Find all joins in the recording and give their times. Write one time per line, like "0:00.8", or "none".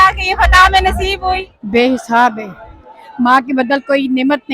0:01.5

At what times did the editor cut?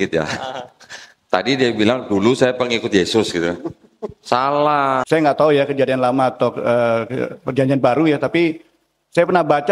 0:05.0

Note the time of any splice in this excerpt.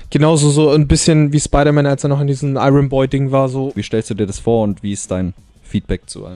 0:03.8

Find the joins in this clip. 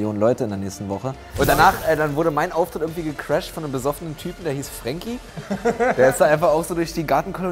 0:01.3

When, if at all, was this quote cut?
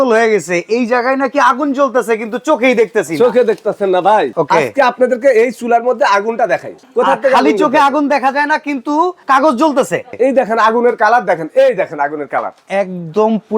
0:04.4
0:06.8
0:09.2
0:10.1

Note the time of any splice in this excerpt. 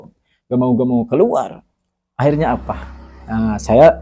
none

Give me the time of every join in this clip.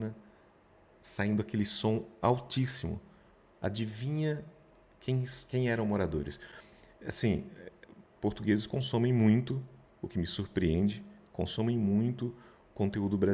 none

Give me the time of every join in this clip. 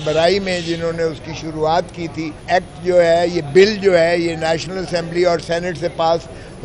0:02.4

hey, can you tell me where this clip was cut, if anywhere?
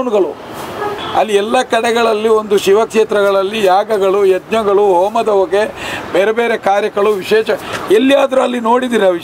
0:01.0

